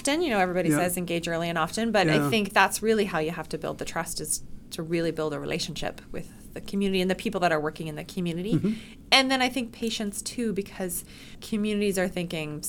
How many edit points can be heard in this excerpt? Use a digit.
1